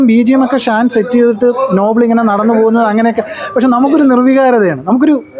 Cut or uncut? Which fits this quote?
uncut